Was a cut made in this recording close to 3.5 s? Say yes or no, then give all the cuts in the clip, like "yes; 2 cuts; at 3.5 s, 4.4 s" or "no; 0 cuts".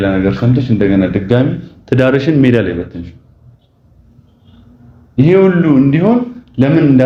no; 0 cuts